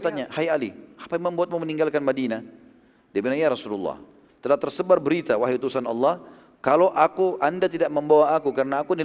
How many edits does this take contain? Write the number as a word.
zero